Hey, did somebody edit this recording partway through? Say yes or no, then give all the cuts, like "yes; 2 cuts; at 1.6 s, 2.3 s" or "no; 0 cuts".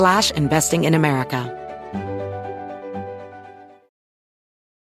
yes; 1 cut; at 1.5 s